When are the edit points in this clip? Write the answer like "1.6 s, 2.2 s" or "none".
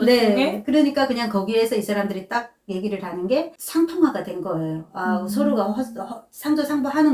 none